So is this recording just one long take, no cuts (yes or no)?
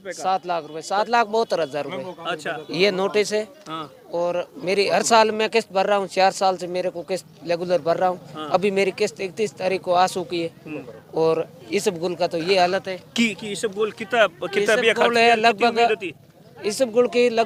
yes